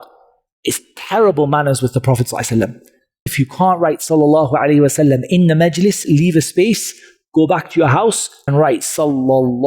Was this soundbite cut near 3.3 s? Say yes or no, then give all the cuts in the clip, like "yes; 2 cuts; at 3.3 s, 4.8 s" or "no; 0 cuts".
yes; 2 cuts; at 3.3 s, 8.3 s